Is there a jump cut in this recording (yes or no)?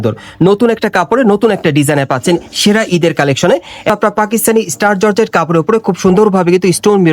yes